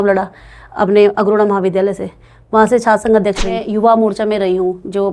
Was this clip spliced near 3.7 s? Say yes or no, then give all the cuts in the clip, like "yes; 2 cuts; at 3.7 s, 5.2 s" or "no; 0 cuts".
yes; 1 cut; at 3.7 s